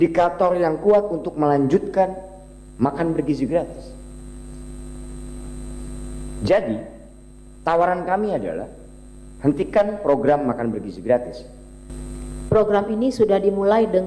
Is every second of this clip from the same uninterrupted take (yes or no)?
no